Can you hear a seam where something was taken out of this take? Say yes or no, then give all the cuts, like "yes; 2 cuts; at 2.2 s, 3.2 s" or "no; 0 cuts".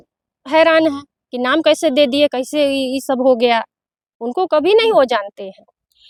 no; 0 cuts